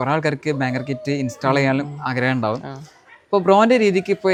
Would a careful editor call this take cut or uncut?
uncut